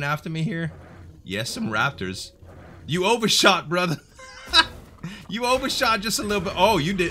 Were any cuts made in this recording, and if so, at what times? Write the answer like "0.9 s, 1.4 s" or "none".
none

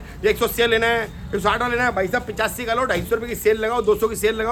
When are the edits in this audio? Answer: none

